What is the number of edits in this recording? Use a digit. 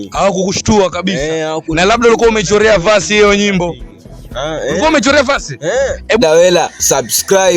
2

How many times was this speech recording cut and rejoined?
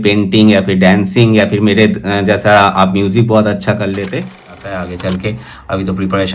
1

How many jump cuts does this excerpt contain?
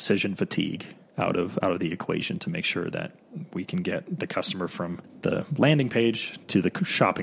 1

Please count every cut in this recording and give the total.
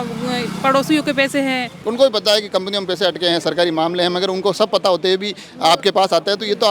1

